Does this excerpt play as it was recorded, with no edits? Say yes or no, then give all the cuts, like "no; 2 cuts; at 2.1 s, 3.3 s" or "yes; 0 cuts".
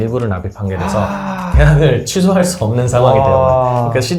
yes; 0 cuts